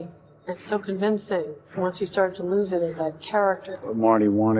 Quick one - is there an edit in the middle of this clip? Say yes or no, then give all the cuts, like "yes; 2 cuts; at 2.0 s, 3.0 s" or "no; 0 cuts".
yes; 2 cuts; at 1.6 s, 3.7 s